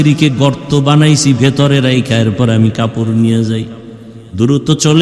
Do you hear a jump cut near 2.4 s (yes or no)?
no